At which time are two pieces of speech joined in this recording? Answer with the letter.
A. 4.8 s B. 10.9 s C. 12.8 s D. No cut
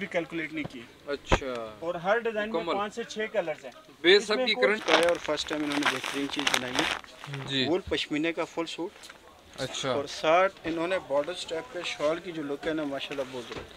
A